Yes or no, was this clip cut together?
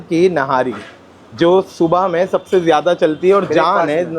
no